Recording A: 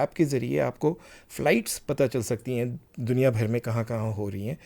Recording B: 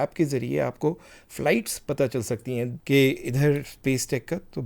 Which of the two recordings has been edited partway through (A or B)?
B